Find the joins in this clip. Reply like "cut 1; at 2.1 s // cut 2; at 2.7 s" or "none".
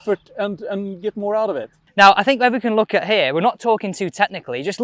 cut 1; at 1.7 s